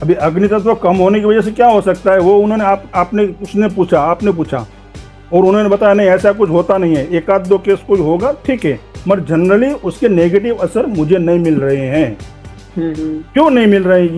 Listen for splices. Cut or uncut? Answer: uncut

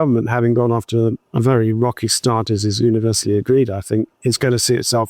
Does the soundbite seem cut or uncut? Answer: cut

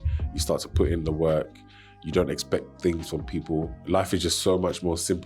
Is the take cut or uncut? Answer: cut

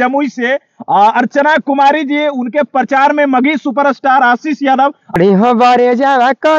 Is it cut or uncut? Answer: cut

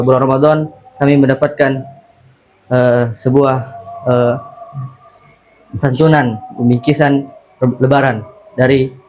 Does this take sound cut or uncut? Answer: uncut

